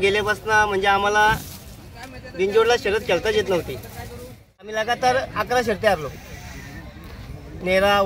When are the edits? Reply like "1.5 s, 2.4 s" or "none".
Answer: 4.7 s